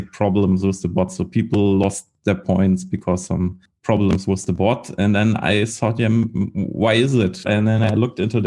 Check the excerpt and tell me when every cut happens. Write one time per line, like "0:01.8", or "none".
0:03.7
0:07.5